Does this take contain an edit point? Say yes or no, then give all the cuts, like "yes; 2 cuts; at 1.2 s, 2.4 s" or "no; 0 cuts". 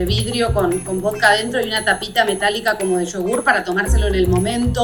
no; 0 cuts